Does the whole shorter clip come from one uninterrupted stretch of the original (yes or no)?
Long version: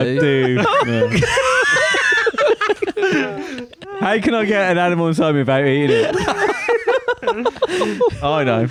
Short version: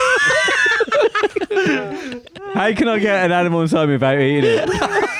yes